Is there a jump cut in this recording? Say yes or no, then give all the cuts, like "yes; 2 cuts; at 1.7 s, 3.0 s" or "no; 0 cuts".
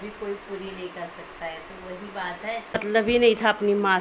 yes; 1 cut; at 2.8 s